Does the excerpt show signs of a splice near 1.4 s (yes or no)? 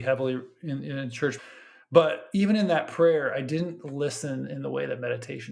yes